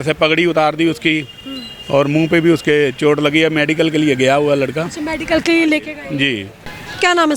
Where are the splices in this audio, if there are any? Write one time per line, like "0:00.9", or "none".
none

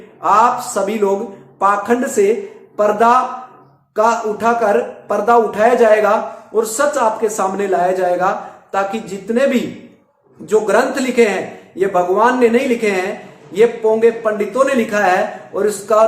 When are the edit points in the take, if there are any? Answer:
none

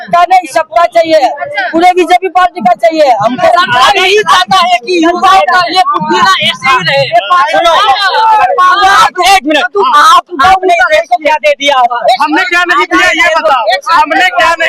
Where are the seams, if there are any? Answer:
0:03.4
0:09.0

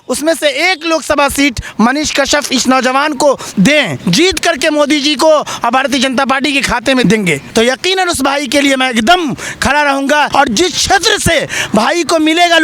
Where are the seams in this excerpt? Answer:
0:04.0
0:07.1
0:10.3

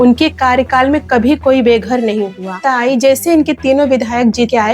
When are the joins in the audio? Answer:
0:02.6

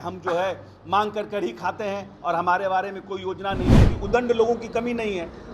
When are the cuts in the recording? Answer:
0:03.9

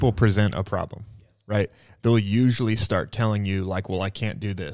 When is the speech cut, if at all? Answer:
none

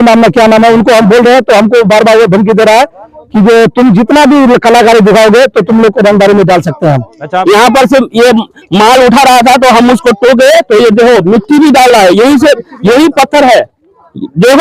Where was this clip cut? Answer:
0:07.4

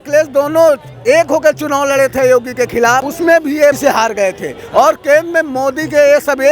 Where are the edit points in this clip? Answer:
0:03.1
0:03.8

